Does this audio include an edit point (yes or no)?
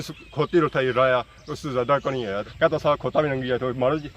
yes